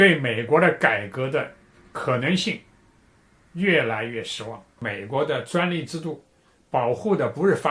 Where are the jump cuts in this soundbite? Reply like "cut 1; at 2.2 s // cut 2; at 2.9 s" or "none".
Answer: cut 1; at 4.8 s